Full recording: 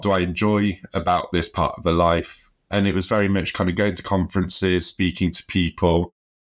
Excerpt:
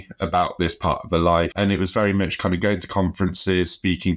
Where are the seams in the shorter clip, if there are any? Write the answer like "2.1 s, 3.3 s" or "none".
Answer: 1.5 s